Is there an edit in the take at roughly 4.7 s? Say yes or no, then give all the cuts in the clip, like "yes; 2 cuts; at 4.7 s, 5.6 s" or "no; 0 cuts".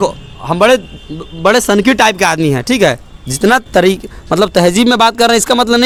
no; 0 cuts